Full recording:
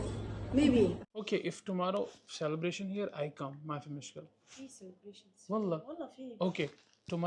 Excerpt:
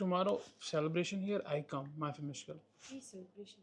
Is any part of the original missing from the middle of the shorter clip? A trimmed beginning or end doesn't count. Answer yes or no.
no